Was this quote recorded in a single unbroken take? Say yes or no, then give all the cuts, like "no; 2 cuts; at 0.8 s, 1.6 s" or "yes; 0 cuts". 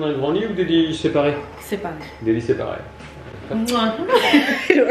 no; 1 cut; at 1.5 s